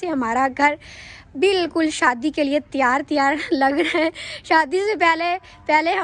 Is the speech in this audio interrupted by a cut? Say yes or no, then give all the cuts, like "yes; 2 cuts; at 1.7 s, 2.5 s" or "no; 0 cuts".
no; 0 cuts